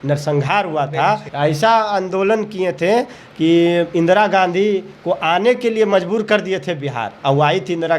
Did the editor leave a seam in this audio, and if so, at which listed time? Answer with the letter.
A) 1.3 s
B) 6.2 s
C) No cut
A